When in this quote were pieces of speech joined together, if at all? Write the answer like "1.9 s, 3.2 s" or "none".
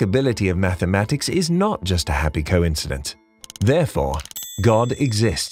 none

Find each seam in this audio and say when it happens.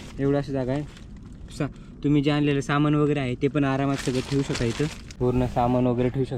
5.0 s

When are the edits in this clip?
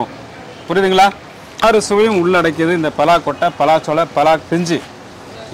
1.6 s

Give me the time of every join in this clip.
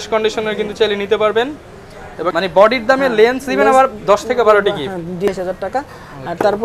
2.2 s, 5.3 s

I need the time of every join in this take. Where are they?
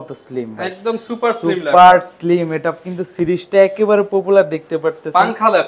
none

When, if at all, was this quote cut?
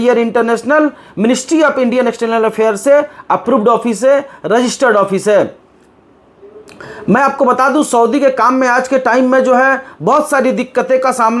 none

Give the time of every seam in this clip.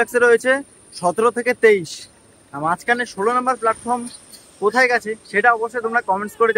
none

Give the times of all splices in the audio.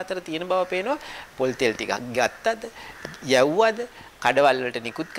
none

